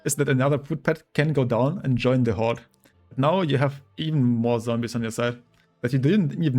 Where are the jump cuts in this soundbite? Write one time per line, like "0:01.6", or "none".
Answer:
none